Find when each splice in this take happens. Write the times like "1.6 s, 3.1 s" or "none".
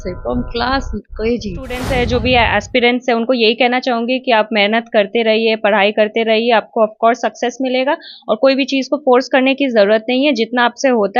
1.8 s